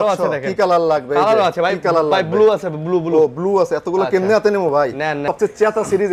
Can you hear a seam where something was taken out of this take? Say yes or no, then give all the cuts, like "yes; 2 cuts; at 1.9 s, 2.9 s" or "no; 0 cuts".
yes; 1 cut; at 5.2 s